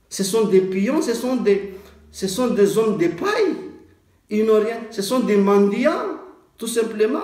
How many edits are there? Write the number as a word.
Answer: zero